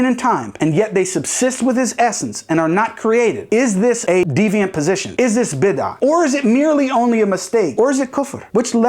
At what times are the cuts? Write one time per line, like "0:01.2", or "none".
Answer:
0:04.2
0:07.7